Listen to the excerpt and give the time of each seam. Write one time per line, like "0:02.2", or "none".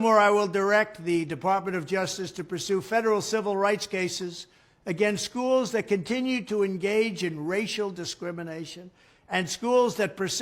0:08.8